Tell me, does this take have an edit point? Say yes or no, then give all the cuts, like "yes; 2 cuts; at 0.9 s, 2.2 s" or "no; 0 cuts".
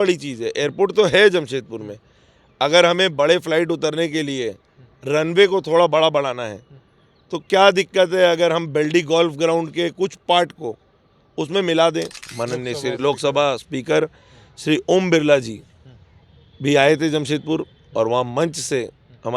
yes; 1 cut; at 12.2 s